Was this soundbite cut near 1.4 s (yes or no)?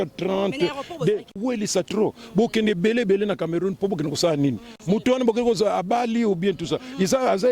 yes